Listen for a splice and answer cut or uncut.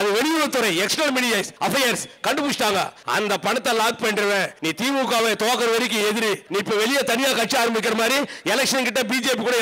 cut